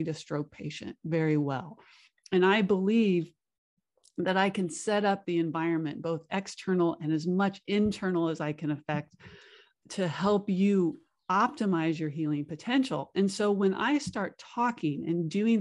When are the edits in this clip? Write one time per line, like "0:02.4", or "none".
0:09.6